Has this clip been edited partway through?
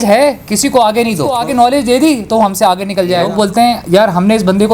yes; 2 cuts; at 1.4 s, 3.5 s

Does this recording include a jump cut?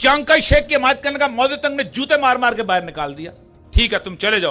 yes; 1 cut; at 3.6 s

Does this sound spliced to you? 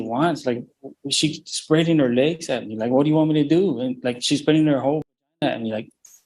no; 0 cuts

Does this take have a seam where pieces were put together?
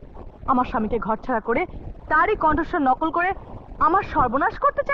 no; 0 cuts

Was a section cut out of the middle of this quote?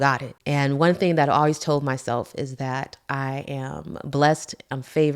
no; 0 cuts

